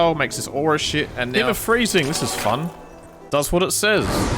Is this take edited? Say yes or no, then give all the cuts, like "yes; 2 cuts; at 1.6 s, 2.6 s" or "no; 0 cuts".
yes; 1 cut; at 1.2 s